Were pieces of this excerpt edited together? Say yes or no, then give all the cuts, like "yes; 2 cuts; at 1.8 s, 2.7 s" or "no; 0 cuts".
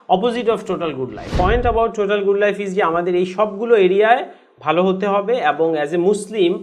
yes; 1 cut; at 1.3 s